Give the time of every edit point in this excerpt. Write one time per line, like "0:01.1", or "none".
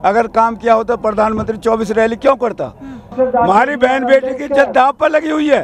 0:03.1